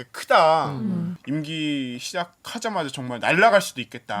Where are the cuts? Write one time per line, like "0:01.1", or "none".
0:01.2